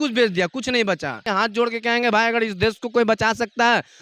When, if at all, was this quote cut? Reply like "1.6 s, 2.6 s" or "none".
1.2 s